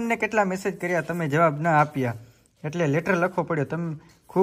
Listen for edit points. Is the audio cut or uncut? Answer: uncut